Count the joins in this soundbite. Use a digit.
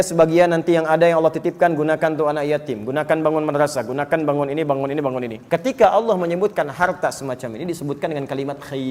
1